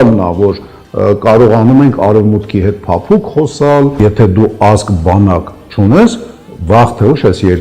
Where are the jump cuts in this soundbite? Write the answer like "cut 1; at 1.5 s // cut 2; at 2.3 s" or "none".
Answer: cut 1; at 3.9 s